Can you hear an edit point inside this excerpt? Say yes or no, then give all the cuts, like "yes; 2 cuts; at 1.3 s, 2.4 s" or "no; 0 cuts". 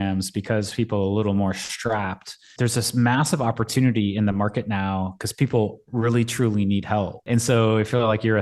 yes; 2 cuts; at 2.5 s, 7.2 s